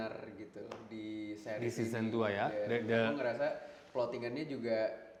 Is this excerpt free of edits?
yes; 0 cuts

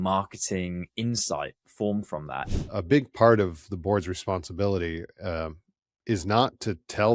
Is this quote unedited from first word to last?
no; 1 cut; at 2.5 s

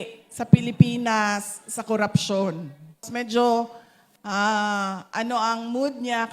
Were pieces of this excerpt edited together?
yes; 1 cut; at 3.1 s

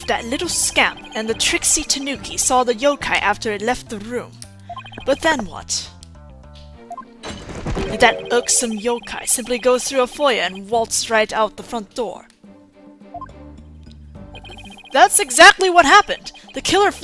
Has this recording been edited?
no; 0 cuts

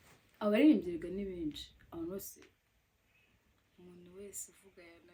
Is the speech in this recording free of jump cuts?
yes; 0 cuts

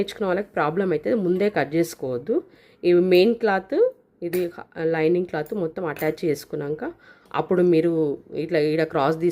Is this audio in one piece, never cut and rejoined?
yes; 0 cuts

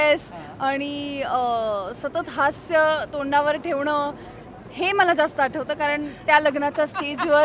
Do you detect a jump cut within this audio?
no; 0 cuts

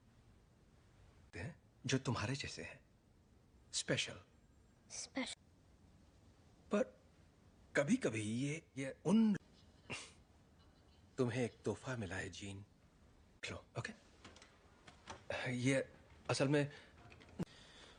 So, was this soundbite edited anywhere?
no; 0 cuts

